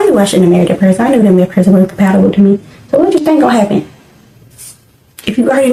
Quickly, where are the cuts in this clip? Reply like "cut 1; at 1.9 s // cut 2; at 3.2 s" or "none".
none